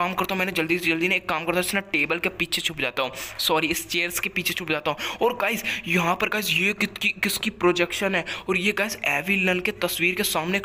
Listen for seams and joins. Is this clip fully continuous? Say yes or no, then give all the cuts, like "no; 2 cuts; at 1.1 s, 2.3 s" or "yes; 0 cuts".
yes; 0 cuts